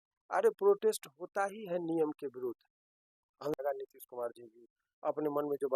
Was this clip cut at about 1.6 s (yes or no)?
no